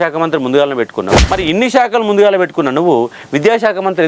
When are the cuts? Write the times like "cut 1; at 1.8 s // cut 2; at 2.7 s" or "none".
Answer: cut 1; at 1.2 s